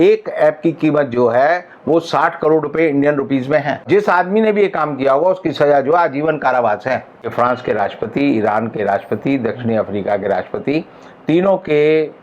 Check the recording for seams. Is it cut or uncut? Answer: cut